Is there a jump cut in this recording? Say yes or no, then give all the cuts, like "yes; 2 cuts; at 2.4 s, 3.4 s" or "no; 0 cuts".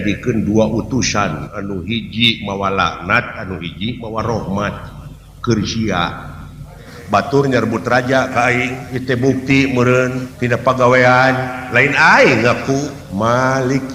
yes; 4 cuts; at 6.9 s, 8.9 s, 10.3 s, 13.0 s